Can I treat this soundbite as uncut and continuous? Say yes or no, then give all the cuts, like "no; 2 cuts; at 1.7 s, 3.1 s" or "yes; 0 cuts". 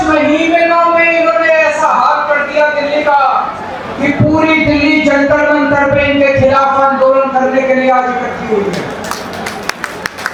yes; 0 cuts